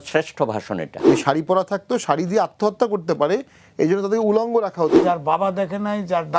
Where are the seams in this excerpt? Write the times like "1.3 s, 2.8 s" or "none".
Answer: 1.0 s, 5.0 s